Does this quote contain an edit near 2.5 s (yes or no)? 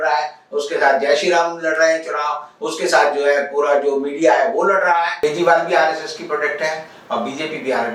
no